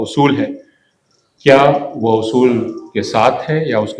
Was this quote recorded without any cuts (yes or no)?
yes